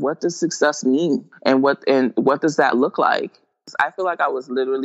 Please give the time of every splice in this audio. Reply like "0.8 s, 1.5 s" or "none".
1.3 s, 3.6 s